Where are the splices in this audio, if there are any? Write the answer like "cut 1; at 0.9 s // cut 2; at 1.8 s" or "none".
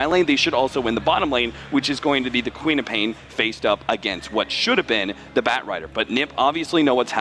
none